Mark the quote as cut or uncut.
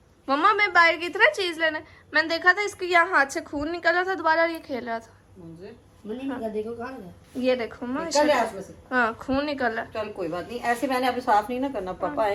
uncut